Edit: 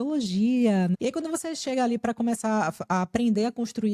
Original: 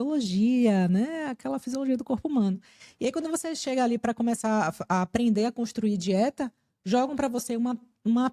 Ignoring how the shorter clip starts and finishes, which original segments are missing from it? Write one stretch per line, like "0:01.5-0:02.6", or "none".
0:00.9-0:02.9